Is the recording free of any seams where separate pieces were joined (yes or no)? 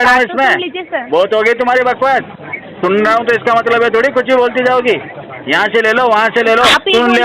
yes